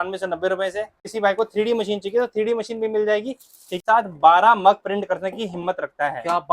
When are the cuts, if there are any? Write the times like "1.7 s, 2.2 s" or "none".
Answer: 1.1 s, 3.8 s